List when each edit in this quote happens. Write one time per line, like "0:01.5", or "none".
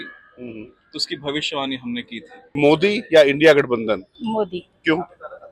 0:02.6
0:04.1